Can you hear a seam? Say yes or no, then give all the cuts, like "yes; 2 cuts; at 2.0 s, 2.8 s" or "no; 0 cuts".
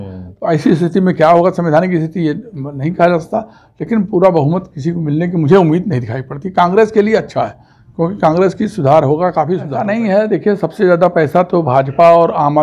yes; 1 cut; at 9.7 s